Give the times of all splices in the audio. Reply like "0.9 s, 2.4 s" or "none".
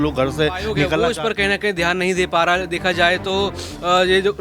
1.0 s